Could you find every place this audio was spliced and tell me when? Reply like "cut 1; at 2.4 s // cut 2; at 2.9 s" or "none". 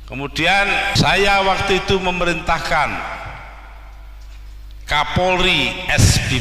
cut 1; at 0.9 s